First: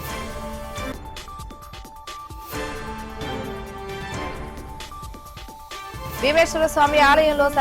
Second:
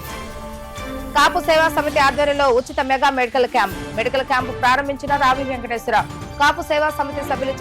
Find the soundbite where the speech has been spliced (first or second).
second